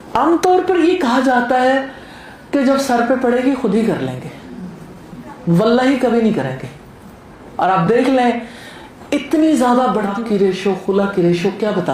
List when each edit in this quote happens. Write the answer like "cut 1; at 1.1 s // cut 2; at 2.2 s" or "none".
none